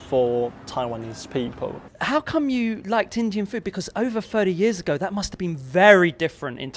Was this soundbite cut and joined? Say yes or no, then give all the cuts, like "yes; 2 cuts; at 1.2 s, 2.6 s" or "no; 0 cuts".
yes; 1 cut; at 1.8 s